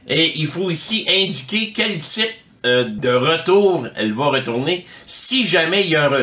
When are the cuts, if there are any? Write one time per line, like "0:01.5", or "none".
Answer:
0:02.9

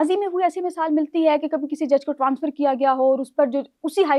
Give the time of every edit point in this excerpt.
none

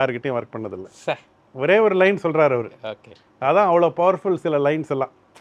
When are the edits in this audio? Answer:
0:01.4

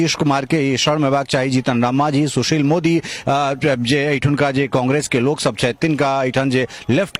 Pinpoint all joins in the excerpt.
none

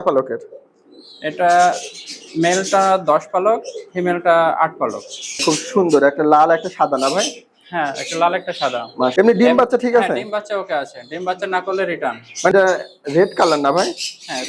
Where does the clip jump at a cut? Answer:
0:05.4
0:09.1
0:12.5

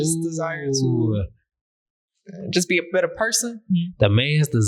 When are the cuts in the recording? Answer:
0:03.7

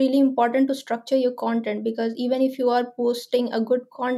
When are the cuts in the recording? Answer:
none

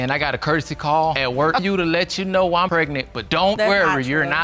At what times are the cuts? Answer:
0:01.6

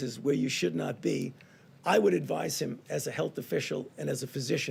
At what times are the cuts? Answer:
none

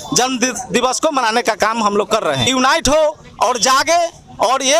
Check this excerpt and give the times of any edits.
0:02.5

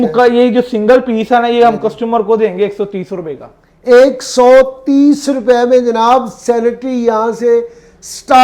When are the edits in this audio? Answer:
none

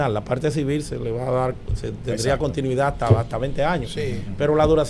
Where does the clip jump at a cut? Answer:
none

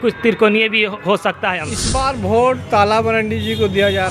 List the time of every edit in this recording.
0:01.7

